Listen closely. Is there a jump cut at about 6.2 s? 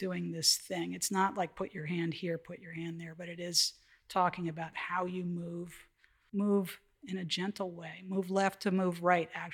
yes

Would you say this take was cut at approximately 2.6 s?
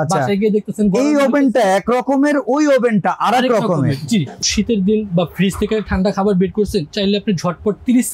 no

